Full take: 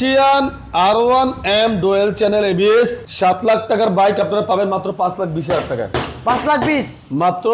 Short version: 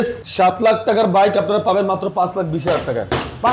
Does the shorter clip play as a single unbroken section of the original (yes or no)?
yes